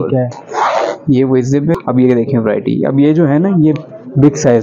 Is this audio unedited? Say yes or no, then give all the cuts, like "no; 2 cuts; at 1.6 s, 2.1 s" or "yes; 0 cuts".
no; 1 cut; at 1.7 s